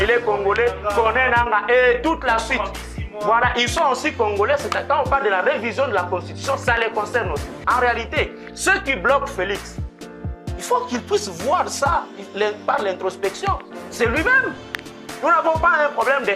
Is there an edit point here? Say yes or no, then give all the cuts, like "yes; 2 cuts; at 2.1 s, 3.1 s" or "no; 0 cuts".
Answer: yes; 1 cut; at 7.5 s